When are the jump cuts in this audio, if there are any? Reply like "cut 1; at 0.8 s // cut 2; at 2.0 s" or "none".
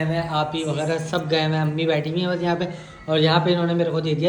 none